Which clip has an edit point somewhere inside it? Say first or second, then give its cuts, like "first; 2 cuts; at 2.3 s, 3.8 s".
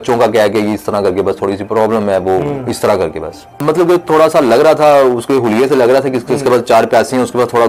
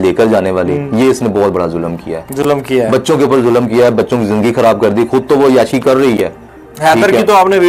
first; 1 cut; at 3.5 s